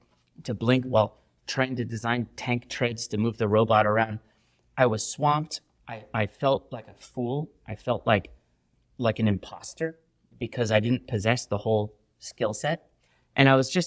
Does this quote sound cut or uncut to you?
uncut